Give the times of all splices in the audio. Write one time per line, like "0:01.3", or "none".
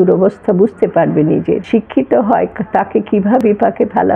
0:01.6
0:03.4